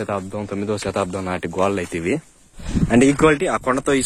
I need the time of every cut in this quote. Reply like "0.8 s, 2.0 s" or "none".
2.6 s

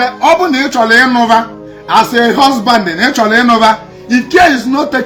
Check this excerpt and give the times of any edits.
none

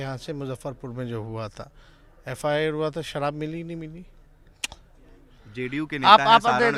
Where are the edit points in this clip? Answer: none

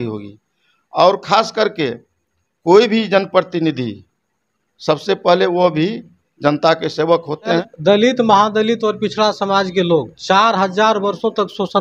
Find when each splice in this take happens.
7.7 s

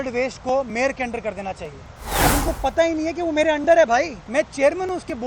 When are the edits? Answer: 2.2 s, 4.2 s

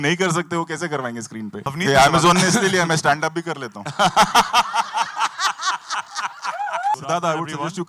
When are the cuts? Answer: 1.6 s, 6.9 s

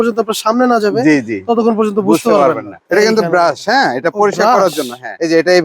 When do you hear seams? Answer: 2.7 s

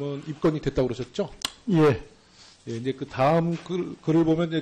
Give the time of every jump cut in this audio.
none

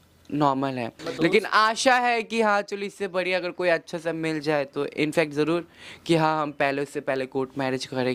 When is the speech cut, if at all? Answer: none

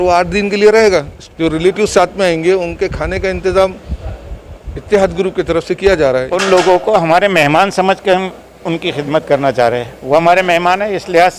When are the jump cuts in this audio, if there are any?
1.2 s, 6.3 s

